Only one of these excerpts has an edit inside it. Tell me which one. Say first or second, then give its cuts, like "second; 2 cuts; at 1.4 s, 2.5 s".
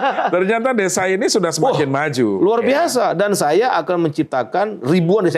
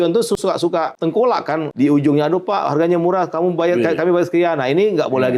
second; 2 cuts; at 0.9 s, 1.7 s